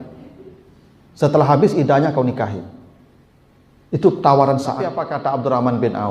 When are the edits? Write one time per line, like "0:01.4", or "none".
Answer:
0:05.0

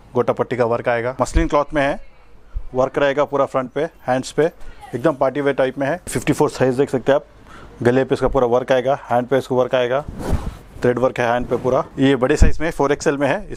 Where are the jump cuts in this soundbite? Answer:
0:01.1
0:06.0
0:11.9

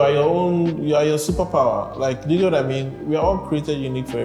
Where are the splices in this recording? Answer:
none

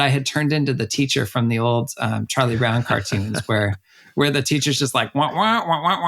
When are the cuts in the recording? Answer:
none

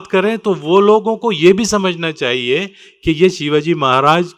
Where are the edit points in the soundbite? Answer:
none

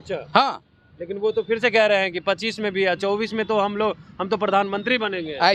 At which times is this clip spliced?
none

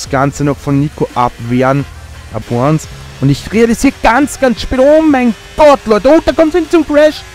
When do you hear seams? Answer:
0:02.4

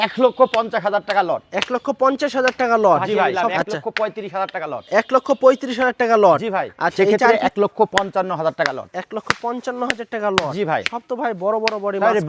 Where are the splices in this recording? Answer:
0:03.4
0:07.1

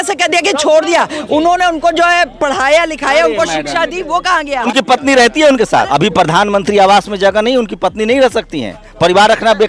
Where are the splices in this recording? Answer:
0:01.2
0:04.7
0:05.9

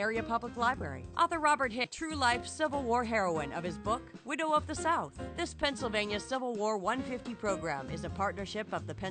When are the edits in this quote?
0:01.9

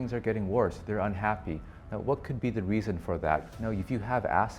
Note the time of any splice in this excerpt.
0:03.5

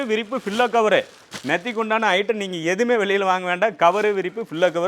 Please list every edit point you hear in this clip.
none

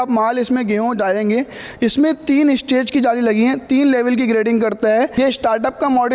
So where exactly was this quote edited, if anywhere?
0:05.1

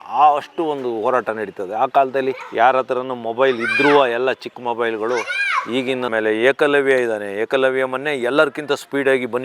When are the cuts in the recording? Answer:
0:06.1

